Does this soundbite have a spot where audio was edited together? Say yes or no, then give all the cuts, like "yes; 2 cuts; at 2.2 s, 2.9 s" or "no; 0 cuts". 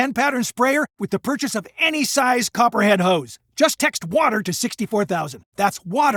no; 0 cuts